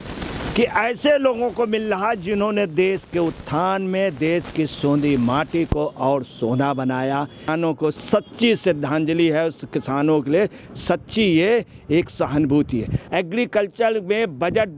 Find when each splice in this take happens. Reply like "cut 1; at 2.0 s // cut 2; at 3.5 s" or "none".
cut 1; at 7.8 s // cut 2; at 13.0 s